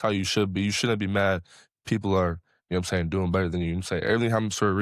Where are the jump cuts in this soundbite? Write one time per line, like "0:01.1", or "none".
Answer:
none